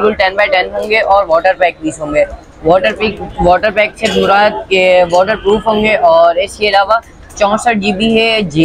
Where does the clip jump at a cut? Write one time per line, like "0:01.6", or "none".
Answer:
none